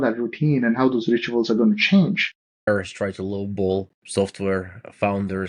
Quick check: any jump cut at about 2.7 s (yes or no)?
yes